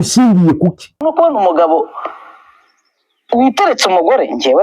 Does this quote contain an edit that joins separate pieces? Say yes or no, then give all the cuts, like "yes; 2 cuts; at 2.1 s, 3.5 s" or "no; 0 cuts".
yes; 1 cut; at 1.0 s